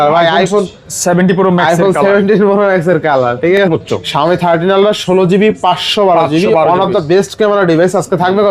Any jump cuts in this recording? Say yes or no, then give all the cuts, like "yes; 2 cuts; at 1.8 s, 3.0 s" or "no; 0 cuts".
yes; 1 cut; at 3.7 s